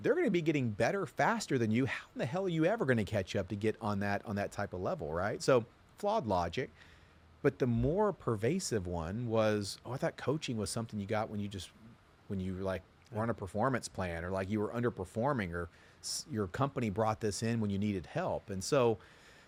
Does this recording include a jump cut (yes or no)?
no